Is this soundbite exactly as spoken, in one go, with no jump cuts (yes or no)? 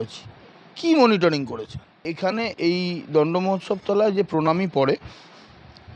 no